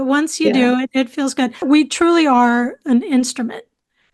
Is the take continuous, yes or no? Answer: no